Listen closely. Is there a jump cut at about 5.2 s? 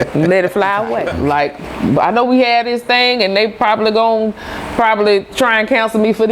no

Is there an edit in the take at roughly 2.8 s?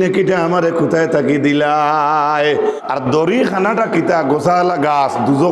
yes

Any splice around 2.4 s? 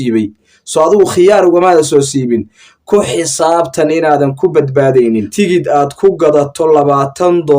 no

